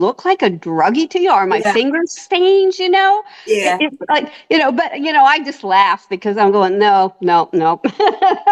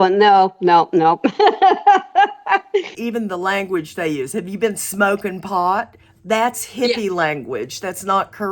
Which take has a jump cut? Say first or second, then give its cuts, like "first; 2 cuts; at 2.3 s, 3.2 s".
second; 1 cut; at 3.0 s